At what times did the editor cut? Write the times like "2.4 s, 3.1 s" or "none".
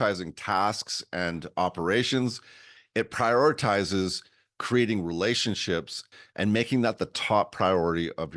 6.0 s